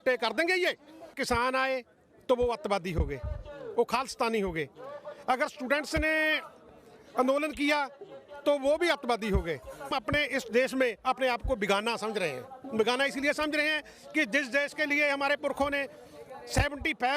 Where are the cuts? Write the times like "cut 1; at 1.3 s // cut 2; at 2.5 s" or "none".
cut 1; at 1.2 s // cut 2; at 9.9 s